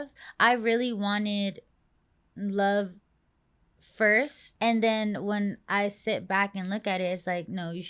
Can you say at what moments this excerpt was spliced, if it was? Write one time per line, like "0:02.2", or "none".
0:04.4